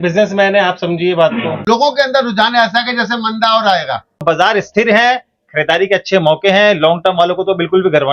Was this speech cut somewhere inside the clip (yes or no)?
yes